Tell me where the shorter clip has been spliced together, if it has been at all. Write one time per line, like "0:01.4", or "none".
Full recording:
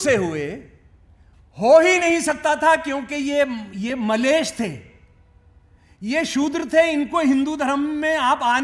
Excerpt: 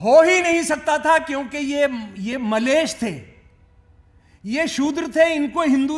none